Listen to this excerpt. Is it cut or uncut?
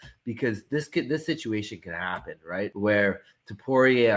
cut